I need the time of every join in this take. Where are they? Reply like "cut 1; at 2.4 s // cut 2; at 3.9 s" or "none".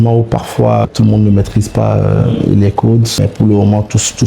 cut 1; at 0.9 s // cut 2; at 3.2 s